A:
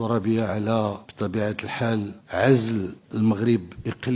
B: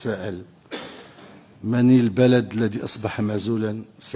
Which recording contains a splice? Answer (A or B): A